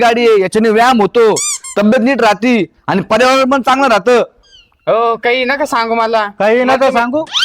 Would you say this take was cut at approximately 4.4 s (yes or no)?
no